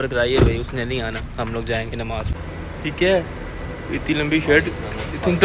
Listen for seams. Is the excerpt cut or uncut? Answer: cut